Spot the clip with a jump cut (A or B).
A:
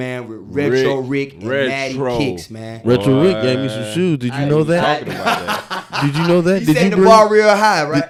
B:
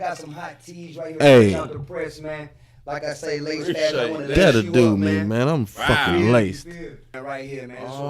B